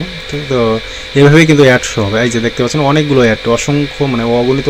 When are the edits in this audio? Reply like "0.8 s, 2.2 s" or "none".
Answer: none